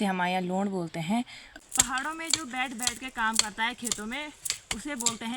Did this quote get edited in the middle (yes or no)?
yes